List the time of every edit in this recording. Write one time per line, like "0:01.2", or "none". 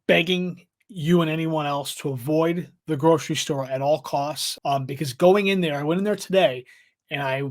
0:04.5